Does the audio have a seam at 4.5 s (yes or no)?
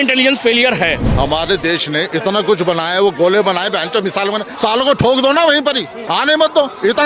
yes